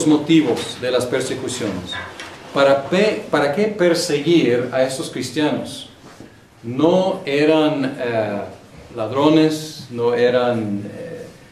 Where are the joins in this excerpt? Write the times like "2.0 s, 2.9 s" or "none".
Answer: 6.0 s

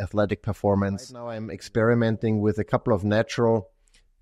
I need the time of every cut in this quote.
1.5 s

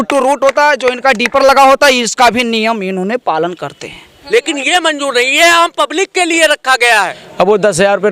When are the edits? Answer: 4.2 s, 7.2 s

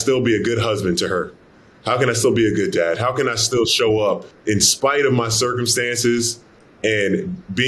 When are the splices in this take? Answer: 4.3 s

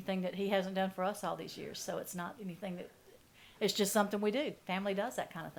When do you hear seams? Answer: none

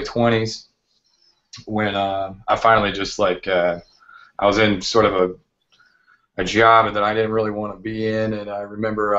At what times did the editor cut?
4.5 s

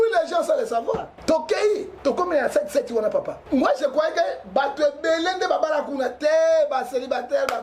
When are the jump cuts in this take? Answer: 1.1 s, 1.9 s, 3.4 s

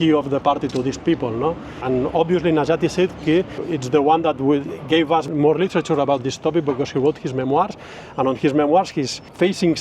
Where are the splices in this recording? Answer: 1.8 s, 3.6 s, 5.3 s, 8.9 s

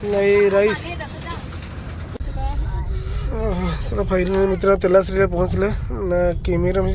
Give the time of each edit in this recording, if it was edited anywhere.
2.1 s

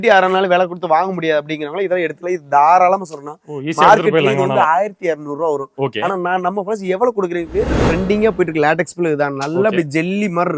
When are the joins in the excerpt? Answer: 7.8 s

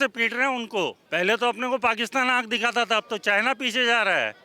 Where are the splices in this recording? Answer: 1.0 s

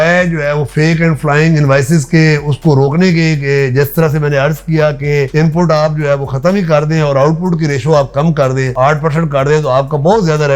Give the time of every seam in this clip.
none

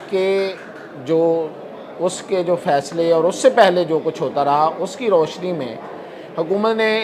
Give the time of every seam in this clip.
none

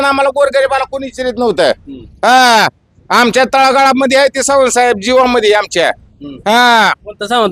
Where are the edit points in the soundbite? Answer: none

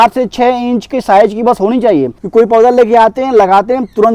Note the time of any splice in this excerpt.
2.2 s

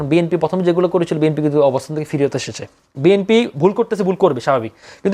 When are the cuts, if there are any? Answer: 2.8 s

